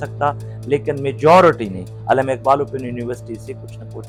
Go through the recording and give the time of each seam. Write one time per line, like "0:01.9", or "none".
none